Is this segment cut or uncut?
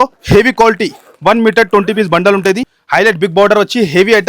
cut